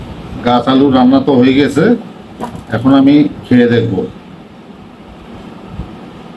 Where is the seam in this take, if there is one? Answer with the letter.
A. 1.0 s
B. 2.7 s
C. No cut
C